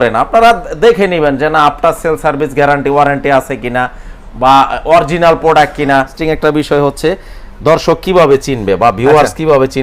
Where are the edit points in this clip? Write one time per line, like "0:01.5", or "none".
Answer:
0:06.2